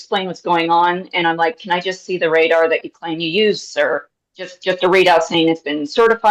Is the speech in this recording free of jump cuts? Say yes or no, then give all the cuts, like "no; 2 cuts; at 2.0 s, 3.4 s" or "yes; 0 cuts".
yes; 0 cuts